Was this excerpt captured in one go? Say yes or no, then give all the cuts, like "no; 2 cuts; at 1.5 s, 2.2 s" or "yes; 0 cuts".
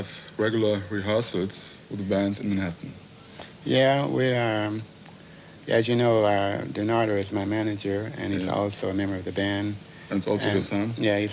no; 1 cut; at 9.8 s